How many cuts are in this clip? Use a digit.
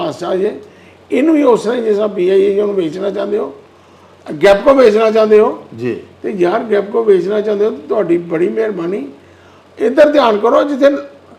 0